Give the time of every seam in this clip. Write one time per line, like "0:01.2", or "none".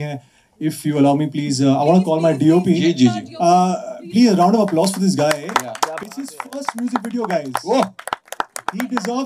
none